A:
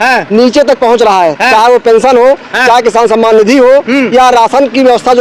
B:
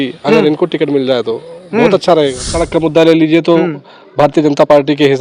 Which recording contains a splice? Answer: B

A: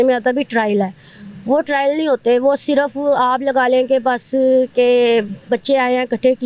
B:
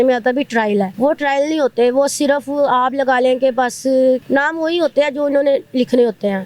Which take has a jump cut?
B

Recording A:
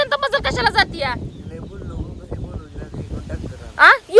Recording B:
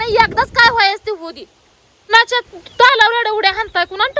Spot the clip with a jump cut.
B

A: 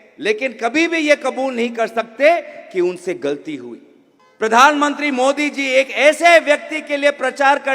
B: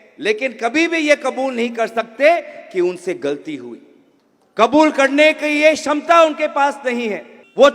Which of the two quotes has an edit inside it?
A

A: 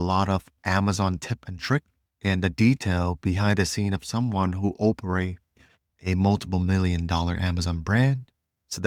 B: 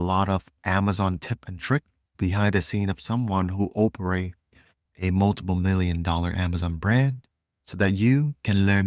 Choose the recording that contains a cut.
B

